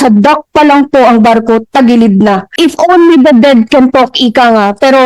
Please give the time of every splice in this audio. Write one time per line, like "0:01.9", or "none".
0:02.5